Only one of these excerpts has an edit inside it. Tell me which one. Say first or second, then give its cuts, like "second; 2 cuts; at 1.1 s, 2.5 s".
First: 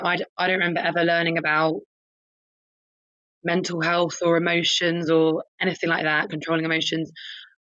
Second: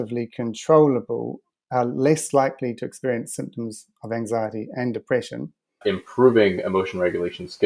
second; 1 cut; at 5.8 s